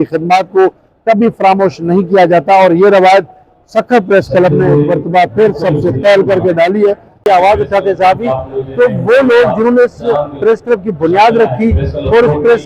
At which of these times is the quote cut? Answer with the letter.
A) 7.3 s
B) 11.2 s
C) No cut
A